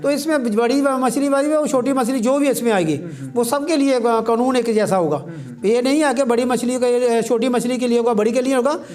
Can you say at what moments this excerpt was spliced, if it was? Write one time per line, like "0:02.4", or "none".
none